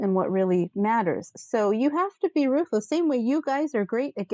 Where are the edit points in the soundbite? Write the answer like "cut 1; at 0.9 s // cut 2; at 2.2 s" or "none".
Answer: none